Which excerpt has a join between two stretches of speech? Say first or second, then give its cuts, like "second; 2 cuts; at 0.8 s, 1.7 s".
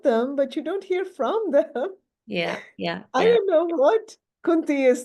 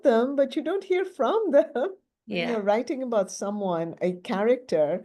second; 1 cut; at 2.5 s